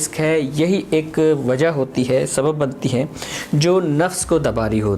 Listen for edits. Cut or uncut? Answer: uncut